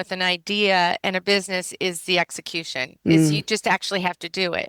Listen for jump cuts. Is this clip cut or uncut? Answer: uncut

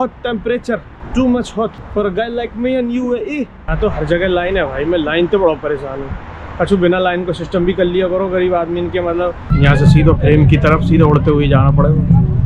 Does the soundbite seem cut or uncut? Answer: cut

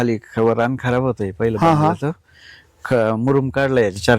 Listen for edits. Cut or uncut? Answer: uncut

